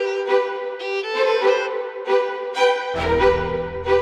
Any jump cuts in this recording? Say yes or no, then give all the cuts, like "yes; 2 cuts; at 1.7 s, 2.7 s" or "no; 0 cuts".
no; 0 cuts